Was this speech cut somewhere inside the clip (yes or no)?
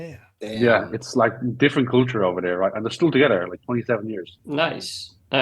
yes